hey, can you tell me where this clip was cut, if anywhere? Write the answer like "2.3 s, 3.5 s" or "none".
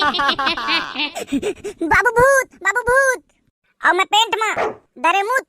1.2 s